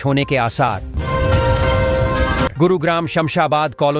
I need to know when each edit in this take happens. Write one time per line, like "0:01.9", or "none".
0:00.9
0:02.5